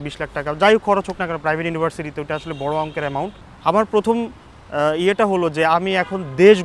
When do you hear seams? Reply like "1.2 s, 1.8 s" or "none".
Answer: 3.4 s